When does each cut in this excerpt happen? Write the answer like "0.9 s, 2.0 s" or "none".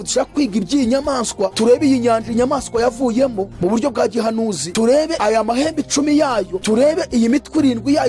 3.5 s